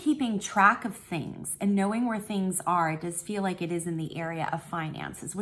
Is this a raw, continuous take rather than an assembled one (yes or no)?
yes